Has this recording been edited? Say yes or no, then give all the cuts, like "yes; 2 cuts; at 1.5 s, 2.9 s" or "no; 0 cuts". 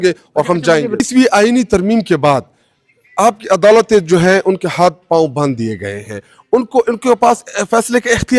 yes; 1 cut; at 1.0 s